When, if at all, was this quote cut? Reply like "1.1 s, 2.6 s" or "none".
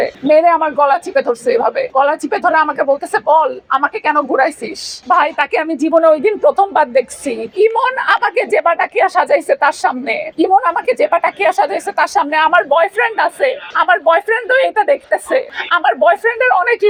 none